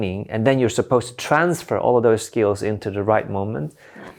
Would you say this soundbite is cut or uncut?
uncut